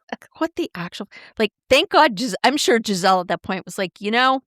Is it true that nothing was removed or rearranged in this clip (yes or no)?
yes